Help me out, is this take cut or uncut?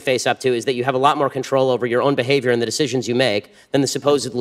uncut